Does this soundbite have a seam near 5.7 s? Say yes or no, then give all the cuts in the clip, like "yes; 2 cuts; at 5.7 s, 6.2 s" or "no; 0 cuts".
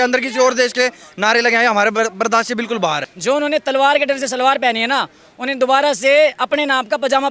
no; 1 cut; at 3.1 s